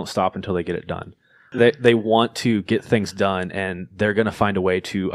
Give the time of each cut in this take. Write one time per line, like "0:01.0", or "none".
0:01.5